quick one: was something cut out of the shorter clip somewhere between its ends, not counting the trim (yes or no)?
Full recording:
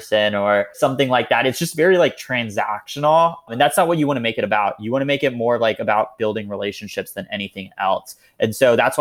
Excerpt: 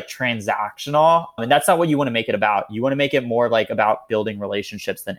no